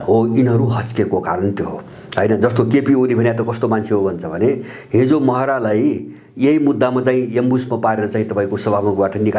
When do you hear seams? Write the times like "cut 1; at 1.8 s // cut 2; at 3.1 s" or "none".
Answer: none